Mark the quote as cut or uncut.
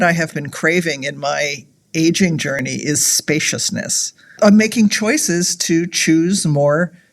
cut